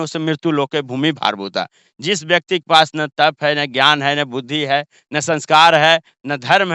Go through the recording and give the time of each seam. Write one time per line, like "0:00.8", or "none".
none